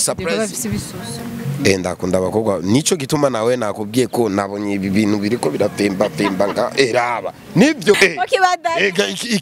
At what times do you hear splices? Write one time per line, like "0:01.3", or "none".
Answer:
0:08.0